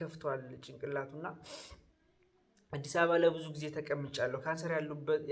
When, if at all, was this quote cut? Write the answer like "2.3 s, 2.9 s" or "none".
none